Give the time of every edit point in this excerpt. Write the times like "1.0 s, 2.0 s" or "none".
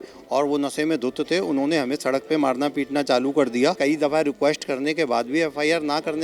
3.8 s